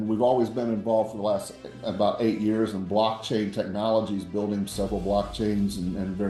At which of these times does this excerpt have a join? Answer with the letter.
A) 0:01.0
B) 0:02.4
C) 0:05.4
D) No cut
D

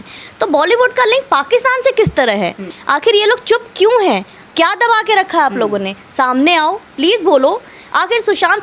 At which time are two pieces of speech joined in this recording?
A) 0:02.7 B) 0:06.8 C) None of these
A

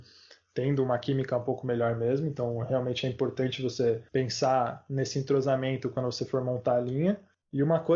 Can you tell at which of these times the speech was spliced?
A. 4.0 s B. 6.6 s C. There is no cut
A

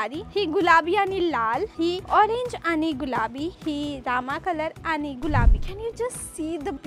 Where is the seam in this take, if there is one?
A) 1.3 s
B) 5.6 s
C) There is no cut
B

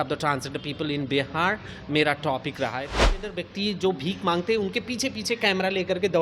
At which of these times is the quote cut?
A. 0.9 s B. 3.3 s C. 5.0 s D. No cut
B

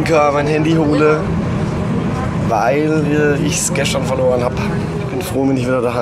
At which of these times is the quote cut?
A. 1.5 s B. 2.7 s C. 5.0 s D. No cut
C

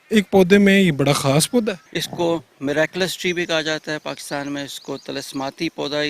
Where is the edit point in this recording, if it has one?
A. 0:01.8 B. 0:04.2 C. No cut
A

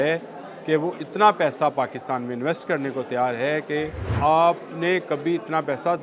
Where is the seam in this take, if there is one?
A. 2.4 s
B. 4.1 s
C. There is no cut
B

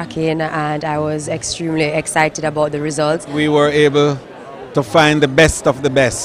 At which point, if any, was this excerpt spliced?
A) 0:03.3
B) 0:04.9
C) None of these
A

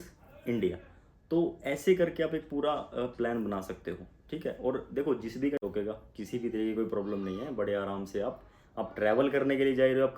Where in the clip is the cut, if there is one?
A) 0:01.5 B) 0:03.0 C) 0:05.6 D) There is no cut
C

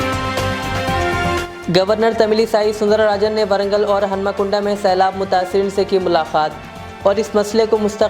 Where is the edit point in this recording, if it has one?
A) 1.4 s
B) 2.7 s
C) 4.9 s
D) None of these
A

